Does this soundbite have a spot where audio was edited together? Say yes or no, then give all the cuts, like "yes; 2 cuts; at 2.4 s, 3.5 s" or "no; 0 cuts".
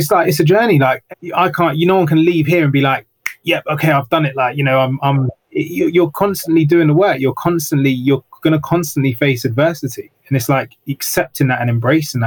yes; 1 cut; at 1.0 s